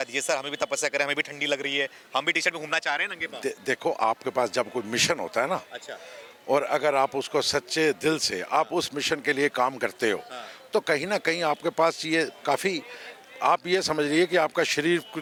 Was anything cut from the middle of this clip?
no; 0 cuts

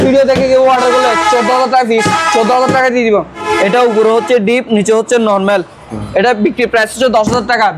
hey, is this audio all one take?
no; 1 cut; at 3.5 s

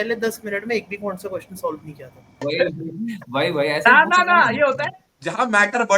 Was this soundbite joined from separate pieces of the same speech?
yes; 1 cut; at 2.3 s

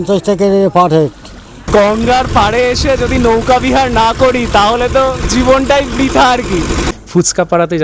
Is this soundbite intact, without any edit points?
no; 2 cuts; at 1.7 s, 6.9 s

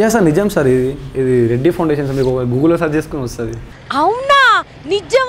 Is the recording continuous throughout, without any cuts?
yes; 0 cuts

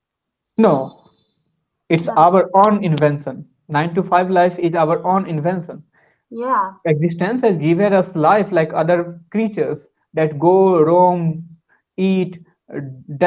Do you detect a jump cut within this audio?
no; 0 cuts

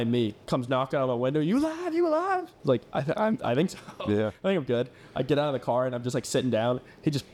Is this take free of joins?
yes; 0 cuts

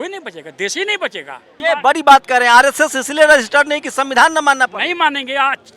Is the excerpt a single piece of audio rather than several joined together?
no; 1 cut; at 1.5 s

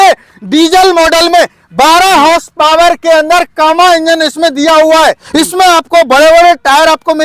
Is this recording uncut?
no; 1 cut; at 5.2 s

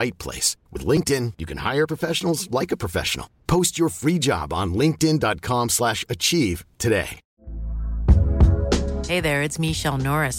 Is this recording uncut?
no; 1 cut; at 7.2 s

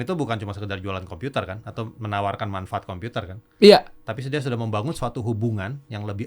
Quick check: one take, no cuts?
no; 1 cut; at 2.0 s

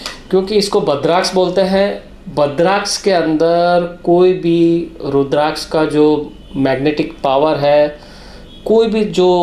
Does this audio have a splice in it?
no; 0 cuts

